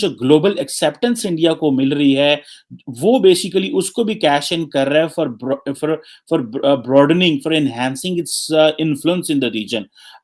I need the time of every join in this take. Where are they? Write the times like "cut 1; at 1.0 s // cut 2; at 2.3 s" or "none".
none